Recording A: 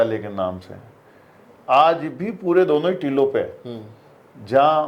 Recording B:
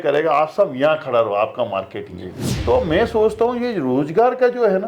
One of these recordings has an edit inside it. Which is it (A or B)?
B